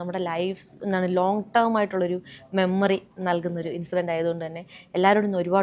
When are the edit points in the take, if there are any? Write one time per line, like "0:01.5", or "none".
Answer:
none